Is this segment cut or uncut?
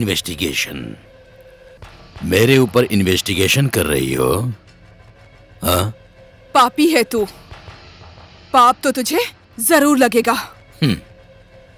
uncut